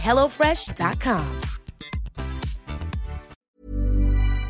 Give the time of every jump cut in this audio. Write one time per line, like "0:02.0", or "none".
0:03.3